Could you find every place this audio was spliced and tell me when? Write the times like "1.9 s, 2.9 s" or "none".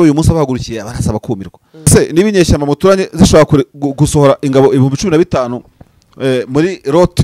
1.9 s